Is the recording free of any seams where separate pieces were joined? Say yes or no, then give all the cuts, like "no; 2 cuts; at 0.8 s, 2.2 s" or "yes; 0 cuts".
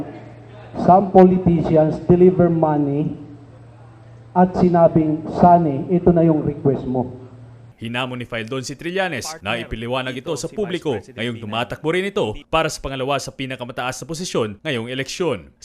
yes; 0 cuts